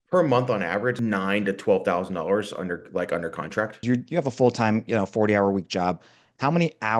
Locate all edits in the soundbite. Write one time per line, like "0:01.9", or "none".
0:01.0
0:03.8